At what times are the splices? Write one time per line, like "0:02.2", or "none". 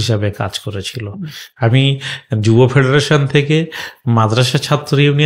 none